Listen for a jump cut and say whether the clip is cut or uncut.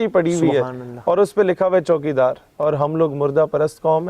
cut